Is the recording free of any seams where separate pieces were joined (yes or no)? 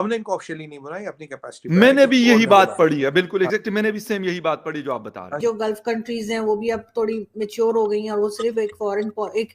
no